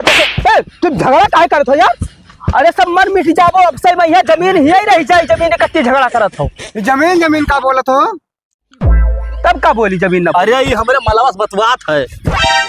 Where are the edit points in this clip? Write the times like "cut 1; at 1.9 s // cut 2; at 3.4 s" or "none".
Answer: none

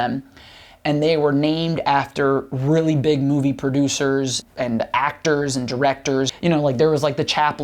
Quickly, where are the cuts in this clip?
cut 1; at 4.4 s // cut 2; at 6.3 s

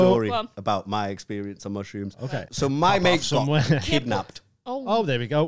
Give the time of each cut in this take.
cut 1; at 2.4 s

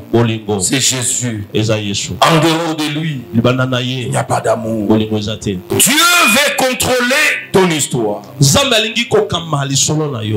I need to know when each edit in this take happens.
cut 1; at 5.6 s

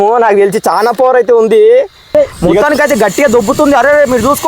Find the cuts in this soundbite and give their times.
cut 1; at 2.3 s

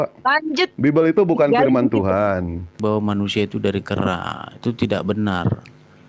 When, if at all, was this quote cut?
cut 1; at 2.8 s

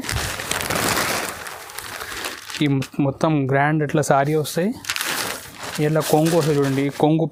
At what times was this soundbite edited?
none

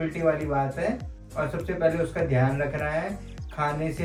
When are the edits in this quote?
none

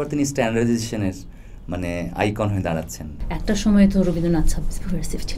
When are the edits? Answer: cut 1; at 3.2 s

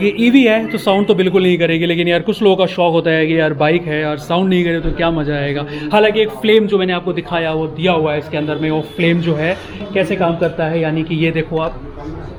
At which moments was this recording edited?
none

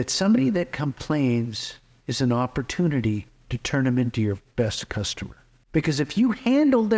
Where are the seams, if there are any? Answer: none

